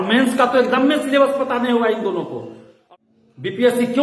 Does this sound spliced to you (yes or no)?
yes